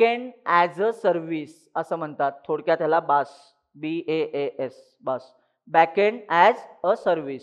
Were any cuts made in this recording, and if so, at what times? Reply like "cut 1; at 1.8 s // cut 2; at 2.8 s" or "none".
none